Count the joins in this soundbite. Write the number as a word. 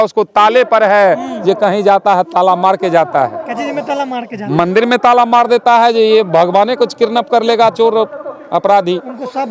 zero